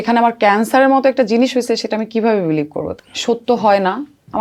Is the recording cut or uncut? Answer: cut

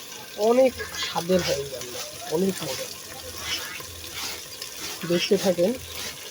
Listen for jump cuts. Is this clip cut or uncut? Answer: uncut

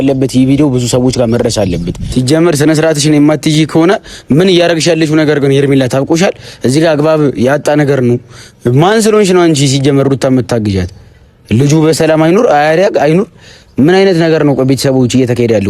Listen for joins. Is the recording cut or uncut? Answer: cut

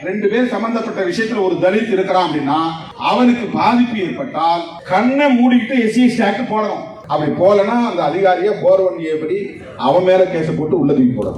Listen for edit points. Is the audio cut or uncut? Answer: cut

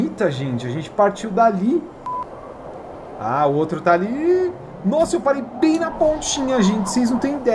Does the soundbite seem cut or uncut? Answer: cut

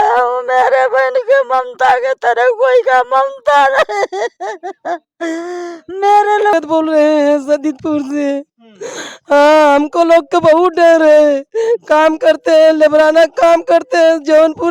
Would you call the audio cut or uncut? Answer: cut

